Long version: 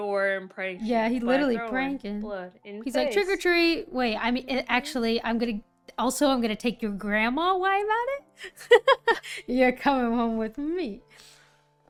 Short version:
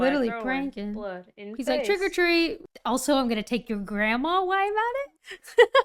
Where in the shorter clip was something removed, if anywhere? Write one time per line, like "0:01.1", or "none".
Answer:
0:02.6